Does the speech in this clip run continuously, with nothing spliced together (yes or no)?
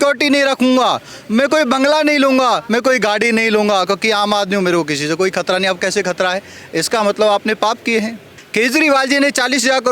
no